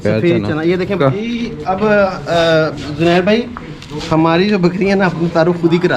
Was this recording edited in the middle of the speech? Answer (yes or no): yes